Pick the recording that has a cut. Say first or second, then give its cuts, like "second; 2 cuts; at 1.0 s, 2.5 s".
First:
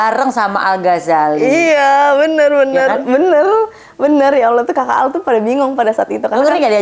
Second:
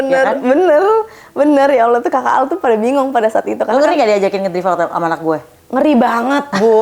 second; 1 cut; at 5.5 s